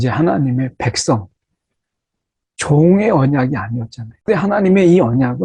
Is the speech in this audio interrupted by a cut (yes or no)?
yes